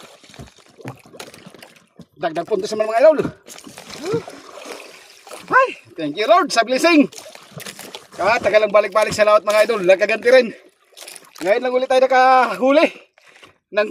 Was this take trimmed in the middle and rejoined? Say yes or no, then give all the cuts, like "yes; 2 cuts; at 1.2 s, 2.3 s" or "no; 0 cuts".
no; 0 cuts